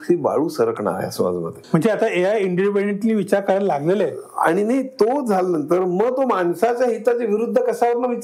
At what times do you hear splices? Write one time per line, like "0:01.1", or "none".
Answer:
0:01.5